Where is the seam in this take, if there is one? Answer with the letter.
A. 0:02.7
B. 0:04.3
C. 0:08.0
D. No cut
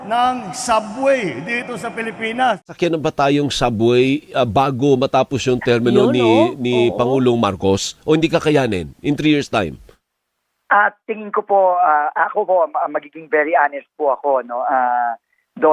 A